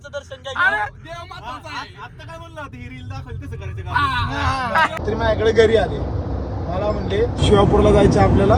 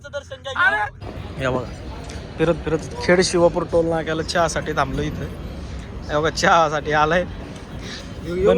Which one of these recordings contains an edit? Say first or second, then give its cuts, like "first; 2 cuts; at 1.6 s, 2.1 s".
second; 1 cut; at 1.1 s